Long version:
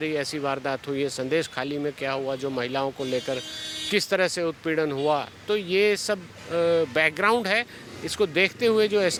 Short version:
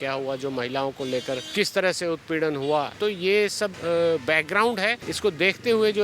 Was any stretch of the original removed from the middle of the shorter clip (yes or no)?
yes